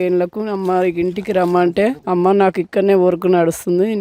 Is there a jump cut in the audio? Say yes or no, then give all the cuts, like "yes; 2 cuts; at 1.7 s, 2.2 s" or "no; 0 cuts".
yes; 1 cut; at 2.0 s